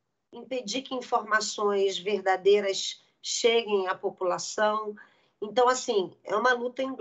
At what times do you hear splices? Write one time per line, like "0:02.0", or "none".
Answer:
none